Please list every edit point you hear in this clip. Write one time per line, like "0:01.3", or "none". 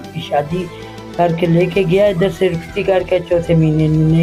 none